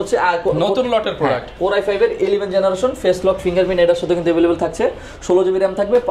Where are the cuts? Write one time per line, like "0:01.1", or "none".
none